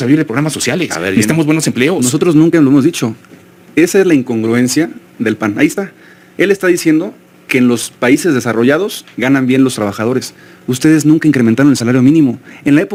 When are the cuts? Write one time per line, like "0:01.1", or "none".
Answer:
none